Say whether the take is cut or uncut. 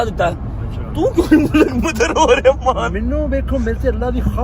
uncut